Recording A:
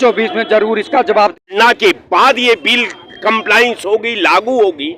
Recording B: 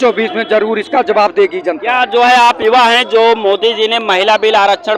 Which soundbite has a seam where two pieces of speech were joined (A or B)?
A